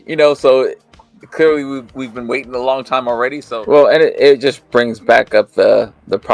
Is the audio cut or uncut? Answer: cut